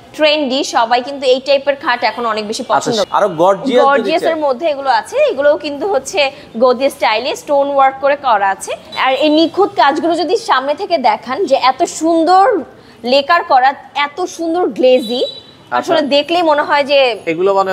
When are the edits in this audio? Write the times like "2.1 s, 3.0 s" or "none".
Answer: 3.0 s, 8.8 s